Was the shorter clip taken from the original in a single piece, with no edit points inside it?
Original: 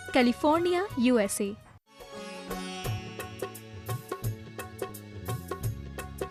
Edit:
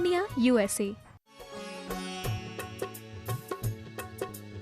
yes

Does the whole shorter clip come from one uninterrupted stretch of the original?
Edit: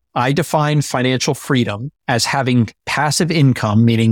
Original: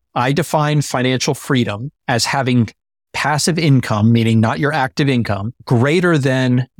no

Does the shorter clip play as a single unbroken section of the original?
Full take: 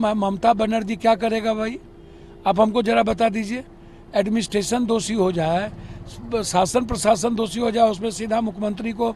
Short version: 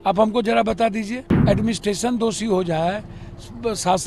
no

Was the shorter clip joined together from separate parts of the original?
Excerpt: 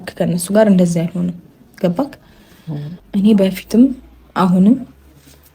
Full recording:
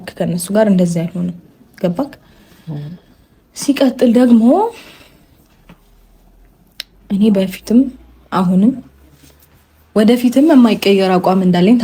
yes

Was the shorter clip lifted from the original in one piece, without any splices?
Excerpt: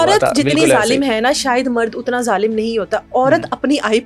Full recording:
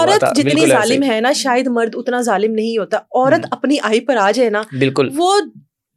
yes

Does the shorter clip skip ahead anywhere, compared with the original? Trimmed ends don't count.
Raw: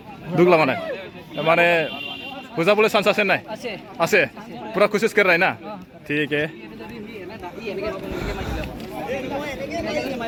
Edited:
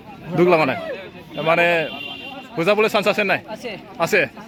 no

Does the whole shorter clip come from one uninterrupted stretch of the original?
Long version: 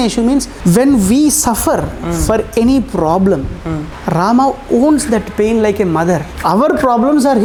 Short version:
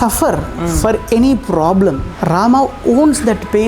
no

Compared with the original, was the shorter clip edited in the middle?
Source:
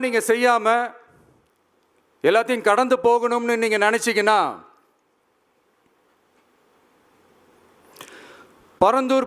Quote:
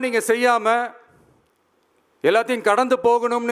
no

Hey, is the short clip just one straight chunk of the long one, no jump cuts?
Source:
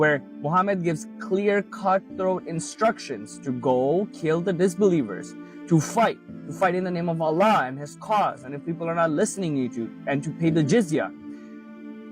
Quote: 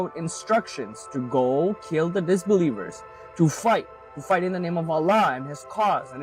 yes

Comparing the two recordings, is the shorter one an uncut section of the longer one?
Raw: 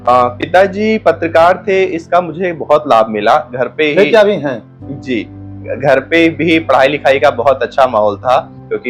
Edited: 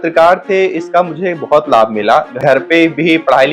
no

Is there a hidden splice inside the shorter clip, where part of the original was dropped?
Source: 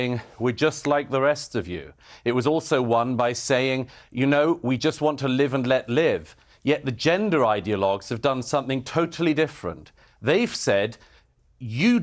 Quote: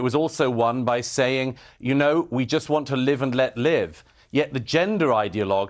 no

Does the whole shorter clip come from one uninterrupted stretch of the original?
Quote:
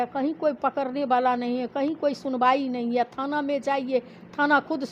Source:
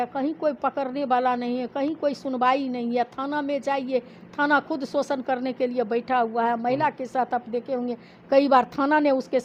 yes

